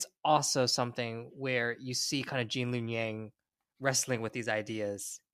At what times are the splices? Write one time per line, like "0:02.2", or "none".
none